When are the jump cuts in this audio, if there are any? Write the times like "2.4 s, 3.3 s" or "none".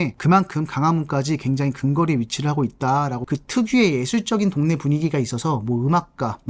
3.2 s